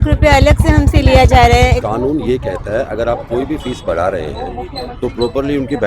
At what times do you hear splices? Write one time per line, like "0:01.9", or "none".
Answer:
0:01.8